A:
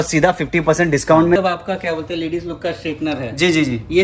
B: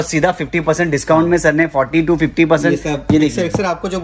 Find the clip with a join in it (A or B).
A